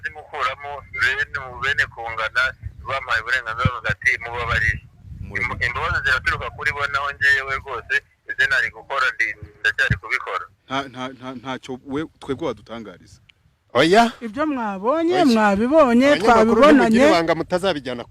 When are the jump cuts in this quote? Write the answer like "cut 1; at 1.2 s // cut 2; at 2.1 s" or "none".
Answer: cut 1; at 10.5 s